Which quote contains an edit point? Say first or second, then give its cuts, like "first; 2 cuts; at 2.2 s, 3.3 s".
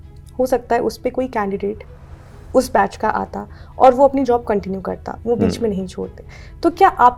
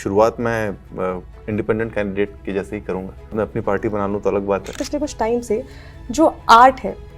second; 2 cuts; at 3.3 s, 4.8 s